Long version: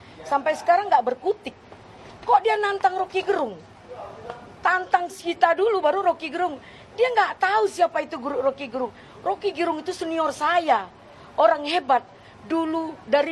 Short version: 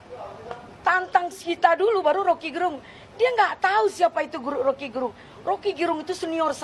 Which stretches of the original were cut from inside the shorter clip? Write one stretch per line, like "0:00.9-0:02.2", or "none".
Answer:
none